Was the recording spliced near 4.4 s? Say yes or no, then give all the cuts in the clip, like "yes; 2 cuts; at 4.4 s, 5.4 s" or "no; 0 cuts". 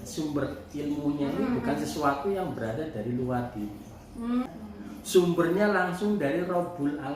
yes; 1 cut; at 4.4 s